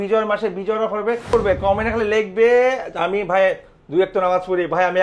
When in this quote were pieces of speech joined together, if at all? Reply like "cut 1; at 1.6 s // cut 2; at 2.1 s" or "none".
cut 1; at 1.3 s